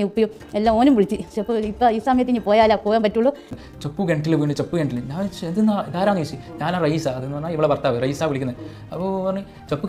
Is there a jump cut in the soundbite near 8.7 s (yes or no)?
no